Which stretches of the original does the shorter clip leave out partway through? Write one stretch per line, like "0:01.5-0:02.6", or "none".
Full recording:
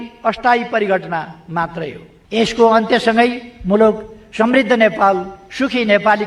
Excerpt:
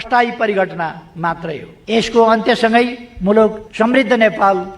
0:02.0-0:02.1
0:04.1-0:04.2